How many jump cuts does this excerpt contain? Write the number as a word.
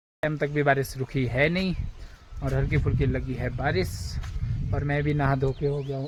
zero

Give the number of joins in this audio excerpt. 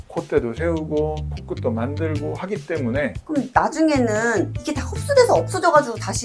one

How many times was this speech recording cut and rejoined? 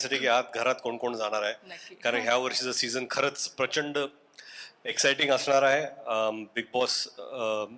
zero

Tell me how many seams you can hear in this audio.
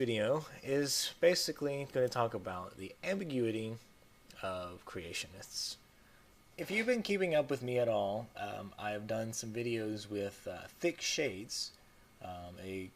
one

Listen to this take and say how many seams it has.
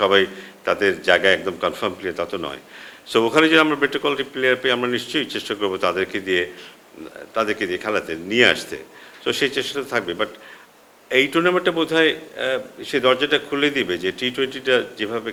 zero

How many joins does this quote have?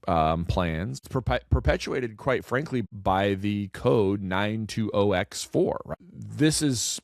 three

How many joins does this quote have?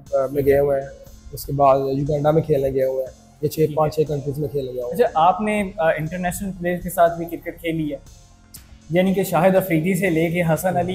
zero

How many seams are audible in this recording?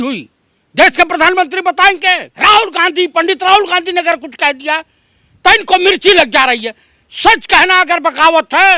one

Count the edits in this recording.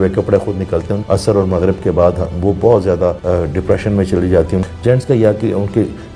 three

